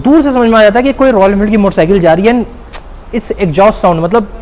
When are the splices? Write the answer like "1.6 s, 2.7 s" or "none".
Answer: none